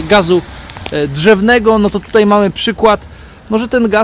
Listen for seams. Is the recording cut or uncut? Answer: uncut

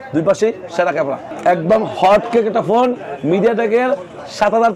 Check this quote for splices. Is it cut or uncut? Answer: cut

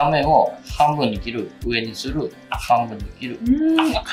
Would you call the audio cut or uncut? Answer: uncut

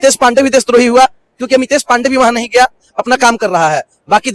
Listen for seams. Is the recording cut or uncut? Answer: uncut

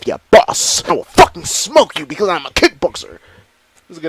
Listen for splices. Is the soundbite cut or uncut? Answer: cut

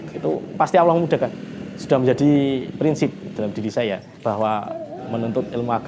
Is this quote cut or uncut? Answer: cut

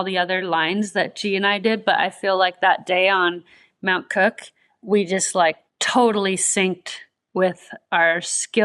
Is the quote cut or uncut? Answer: cut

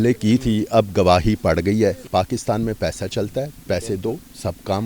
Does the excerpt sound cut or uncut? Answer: cut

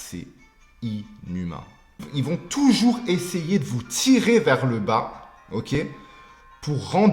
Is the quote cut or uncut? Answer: cut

